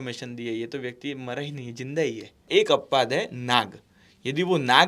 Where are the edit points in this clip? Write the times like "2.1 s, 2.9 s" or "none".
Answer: 2.3 s